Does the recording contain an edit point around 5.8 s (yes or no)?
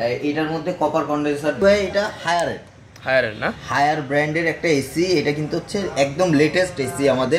no